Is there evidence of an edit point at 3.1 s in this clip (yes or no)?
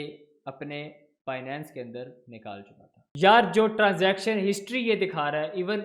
yes